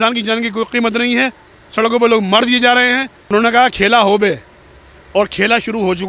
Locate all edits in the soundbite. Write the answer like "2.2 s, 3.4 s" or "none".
3.3 s